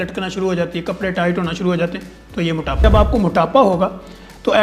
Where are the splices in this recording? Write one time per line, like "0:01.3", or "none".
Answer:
0:02.8